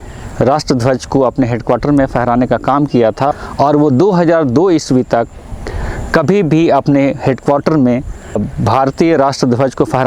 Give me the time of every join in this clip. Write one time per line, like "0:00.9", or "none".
0:03.3
0:08.4